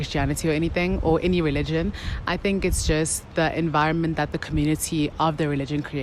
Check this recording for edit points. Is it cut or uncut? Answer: uncut